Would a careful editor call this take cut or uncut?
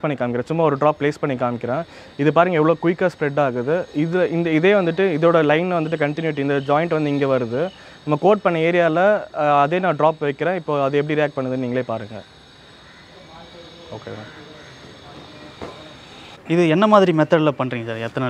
uncut